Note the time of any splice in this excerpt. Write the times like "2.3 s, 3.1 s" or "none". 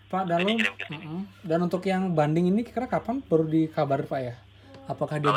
none